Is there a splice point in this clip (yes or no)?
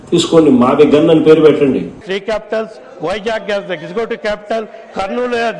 yes